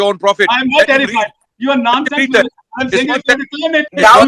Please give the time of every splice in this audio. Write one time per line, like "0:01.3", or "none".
none